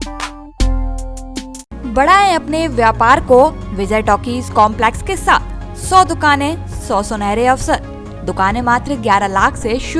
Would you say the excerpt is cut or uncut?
uncut